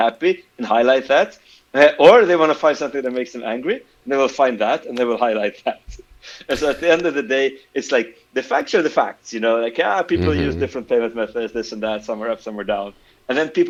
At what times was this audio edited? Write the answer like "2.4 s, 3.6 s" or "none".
none